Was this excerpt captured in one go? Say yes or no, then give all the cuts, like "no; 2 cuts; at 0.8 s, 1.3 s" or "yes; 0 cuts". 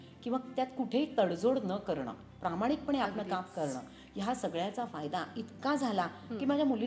yes; 0 cuts